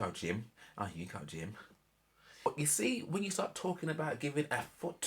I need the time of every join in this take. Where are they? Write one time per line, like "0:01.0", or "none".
0:02.5